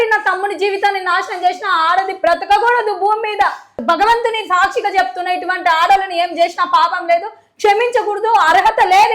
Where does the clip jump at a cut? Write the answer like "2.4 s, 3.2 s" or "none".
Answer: 3.8 s